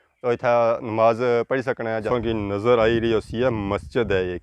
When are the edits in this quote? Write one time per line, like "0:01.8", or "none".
0:02.0